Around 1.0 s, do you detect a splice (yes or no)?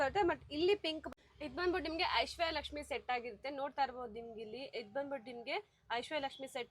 yes